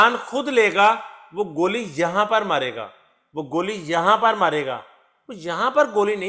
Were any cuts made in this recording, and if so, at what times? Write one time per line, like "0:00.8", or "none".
none